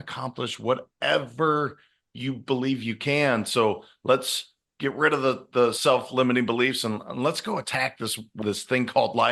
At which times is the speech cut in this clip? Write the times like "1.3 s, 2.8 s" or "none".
8.3 s

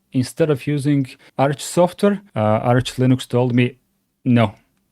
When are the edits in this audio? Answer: 1.2 s, 2.3 s

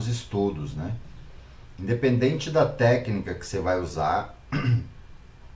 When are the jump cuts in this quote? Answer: none

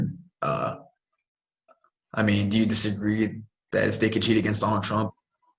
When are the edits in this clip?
none

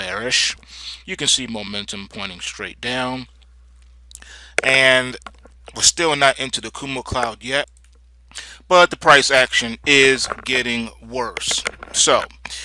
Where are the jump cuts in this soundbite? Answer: none

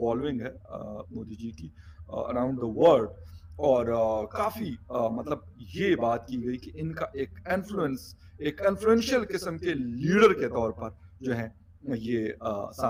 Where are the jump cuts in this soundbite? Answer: none

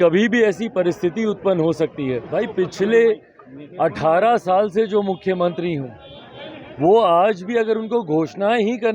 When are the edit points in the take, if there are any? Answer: 2.3 s

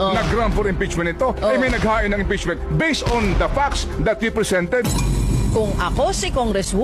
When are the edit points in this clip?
none

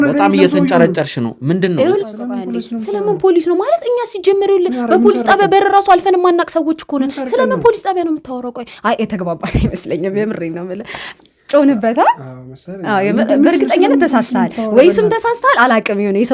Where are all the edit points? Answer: 2.0 s

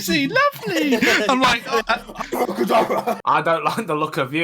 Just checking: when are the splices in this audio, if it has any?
3.2 s

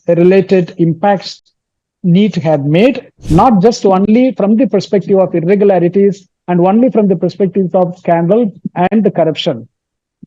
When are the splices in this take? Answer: 3.2 s

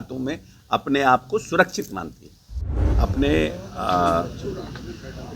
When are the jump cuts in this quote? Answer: 2.8 s

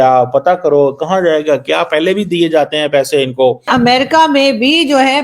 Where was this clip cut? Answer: 3.7 s

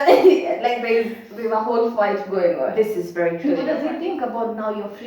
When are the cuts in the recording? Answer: 3.7 s

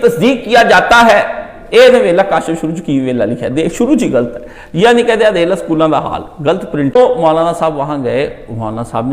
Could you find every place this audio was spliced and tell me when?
7.0 s

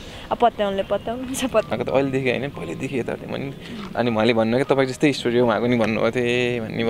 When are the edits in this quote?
1.7 s

